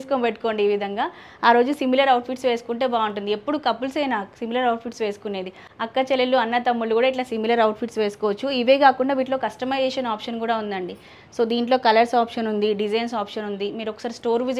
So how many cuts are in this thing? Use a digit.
0